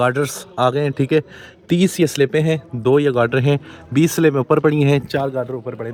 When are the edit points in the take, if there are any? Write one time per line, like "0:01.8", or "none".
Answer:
none